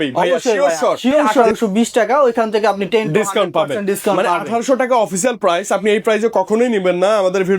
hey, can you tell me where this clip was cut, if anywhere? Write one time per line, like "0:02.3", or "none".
0:01.5